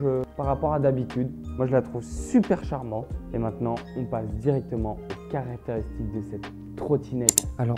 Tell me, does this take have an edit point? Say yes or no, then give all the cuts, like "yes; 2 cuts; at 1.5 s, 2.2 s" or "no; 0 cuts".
no; 0 cuts